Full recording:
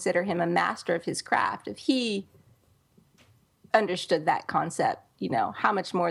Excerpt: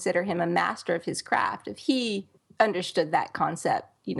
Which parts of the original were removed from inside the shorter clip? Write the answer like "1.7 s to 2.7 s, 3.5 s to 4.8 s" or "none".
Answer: 2.4 s to 3.5 s